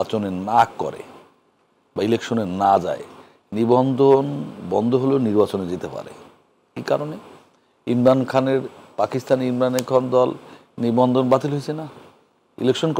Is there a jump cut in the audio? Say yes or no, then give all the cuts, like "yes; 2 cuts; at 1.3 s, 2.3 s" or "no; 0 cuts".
no; 0 cuts